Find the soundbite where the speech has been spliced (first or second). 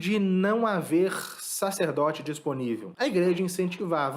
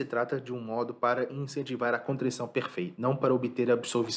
first